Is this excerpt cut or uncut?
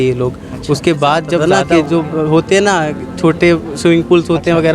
cut